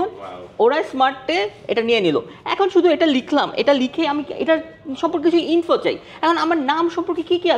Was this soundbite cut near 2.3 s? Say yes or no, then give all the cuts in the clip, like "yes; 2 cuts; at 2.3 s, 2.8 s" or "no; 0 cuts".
no; 0 cuts